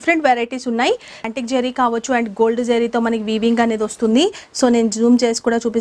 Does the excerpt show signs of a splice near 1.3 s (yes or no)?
yes